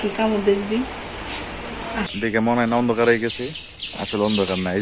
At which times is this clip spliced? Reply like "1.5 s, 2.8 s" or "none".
2.1 s

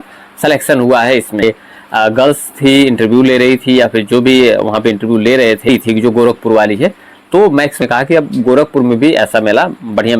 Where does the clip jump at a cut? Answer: 1.4 s, 5.7 s, 7.8 s

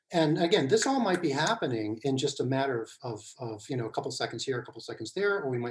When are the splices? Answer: none

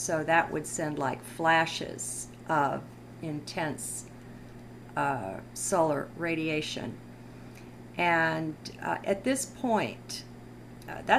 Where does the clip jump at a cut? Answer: 8.6 s

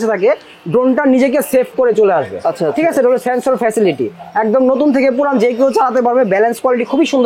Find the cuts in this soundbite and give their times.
none

